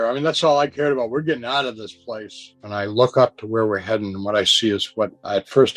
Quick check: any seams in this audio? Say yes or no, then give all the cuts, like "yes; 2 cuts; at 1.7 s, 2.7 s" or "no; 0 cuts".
yes; 1 cut; at 2.6 s